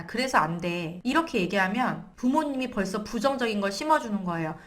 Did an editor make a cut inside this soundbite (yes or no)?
yes